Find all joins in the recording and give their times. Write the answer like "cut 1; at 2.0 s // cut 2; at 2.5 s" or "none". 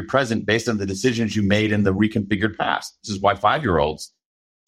cut 1; at 3.1 s